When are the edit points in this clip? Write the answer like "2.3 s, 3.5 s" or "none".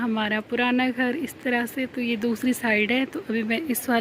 none